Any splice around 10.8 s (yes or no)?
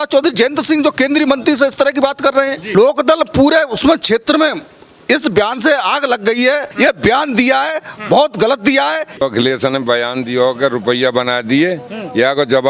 no